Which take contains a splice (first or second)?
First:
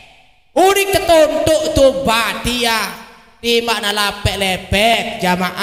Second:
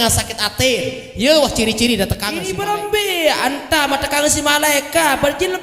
second